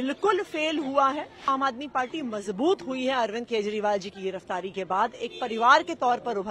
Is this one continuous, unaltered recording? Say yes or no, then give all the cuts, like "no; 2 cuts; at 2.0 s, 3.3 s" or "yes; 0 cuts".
no; 1 cut; at 1.5 s